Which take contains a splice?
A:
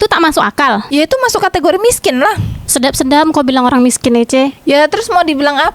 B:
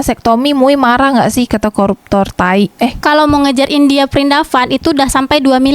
B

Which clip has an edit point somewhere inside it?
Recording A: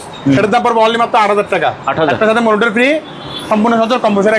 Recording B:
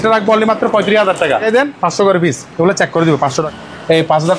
B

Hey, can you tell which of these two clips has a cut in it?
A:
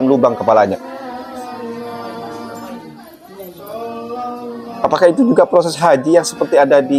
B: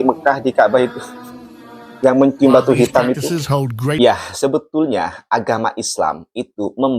B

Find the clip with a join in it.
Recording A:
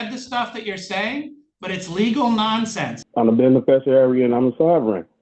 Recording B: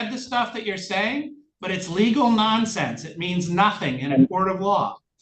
A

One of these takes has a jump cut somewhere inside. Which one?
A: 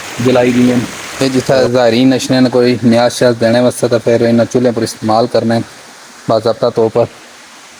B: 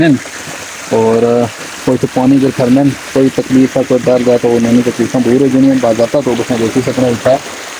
A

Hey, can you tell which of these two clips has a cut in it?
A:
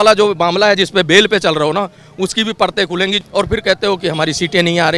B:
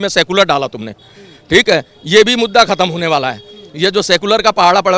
A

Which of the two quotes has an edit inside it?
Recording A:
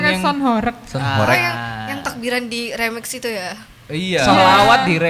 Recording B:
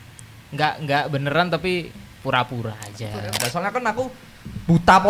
B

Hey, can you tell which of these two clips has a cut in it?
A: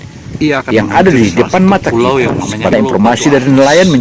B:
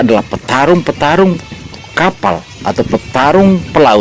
A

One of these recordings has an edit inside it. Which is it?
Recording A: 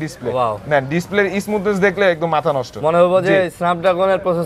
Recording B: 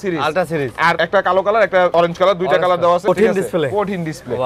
B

